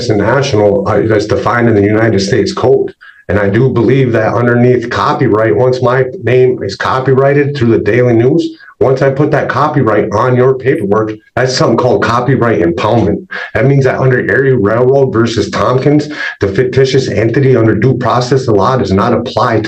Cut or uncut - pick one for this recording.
uncut